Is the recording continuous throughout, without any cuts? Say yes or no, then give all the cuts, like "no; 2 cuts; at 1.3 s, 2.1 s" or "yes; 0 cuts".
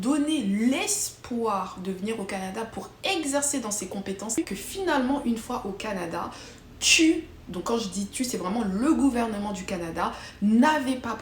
no; 1 cut; at 4.4 s